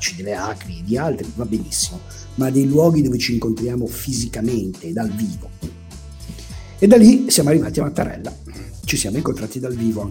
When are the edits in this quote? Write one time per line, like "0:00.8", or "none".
none

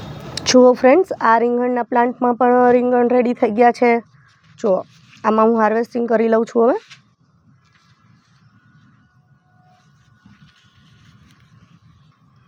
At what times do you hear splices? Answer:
none

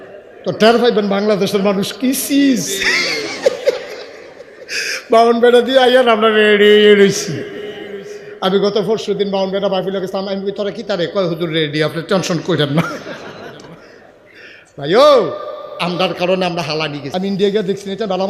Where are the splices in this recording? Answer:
0:17.0

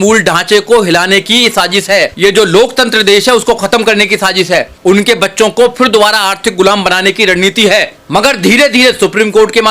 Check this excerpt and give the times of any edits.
0:02.1
0:04.7
0:08.0

